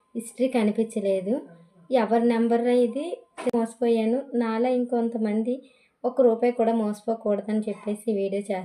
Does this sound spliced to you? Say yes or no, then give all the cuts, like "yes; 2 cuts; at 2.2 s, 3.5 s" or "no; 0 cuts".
yes; 1 cut; at 3.5 s